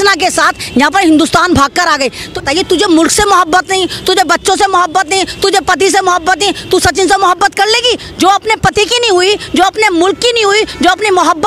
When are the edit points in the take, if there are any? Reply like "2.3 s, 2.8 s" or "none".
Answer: 2.3 s